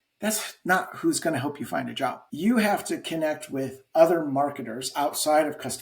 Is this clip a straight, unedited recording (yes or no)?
no